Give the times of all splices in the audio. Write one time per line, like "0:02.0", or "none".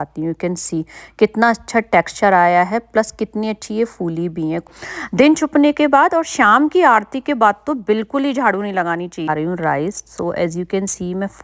0:04.7
0:09.3